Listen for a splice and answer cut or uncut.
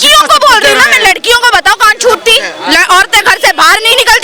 uncut